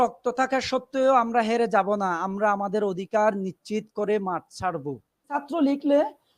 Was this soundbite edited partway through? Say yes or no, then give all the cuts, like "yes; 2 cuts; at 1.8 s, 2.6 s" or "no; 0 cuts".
yes; 1 cut; at 5.4 s